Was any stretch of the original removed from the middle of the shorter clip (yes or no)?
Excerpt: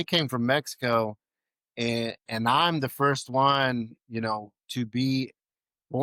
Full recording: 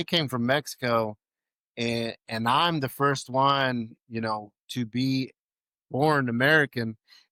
no